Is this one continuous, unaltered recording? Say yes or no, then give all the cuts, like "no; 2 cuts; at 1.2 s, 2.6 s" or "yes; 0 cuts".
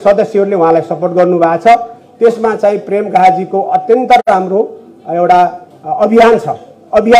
yes; 0 cuts